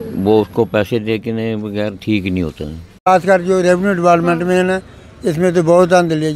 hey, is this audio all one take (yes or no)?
no